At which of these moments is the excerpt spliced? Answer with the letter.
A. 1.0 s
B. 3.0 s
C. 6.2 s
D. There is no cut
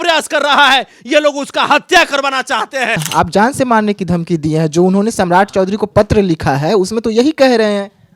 B